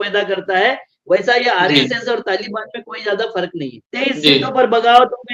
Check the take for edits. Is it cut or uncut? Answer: cut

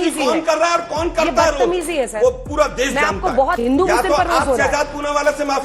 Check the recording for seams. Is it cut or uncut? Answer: cut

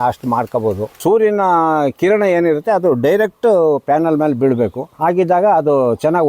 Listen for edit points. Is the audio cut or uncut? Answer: cut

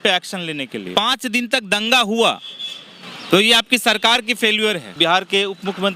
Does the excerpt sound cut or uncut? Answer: cut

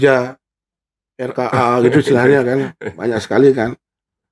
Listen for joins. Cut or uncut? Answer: uncut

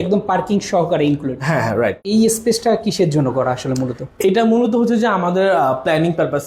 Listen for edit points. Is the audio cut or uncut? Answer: cut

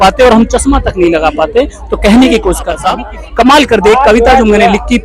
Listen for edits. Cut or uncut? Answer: uncut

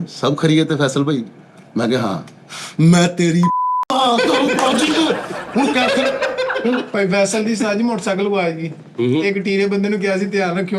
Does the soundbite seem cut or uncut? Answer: cut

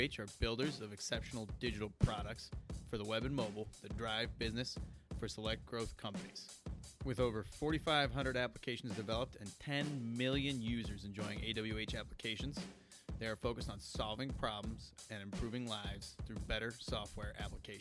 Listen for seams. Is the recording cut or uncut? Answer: uncut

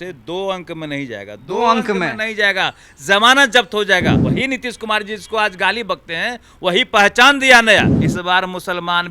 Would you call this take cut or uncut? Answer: cut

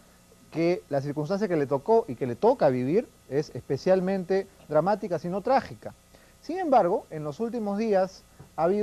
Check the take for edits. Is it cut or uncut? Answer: uncut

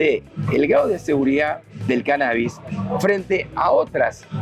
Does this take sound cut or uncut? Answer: uncut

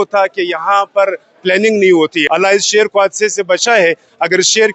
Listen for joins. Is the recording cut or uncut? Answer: cut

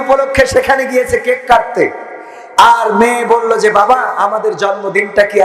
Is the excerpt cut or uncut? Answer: uncut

